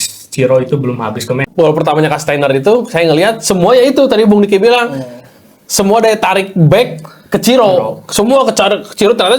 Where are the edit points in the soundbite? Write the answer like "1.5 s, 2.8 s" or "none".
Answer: 1.4 s